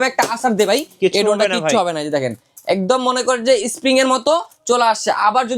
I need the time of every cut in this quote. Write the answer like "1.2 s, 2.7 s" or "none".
none